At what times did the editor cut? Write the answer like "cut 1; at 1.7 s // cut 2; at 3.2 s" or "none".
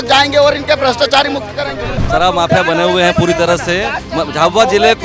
cut 1; at 1.9 s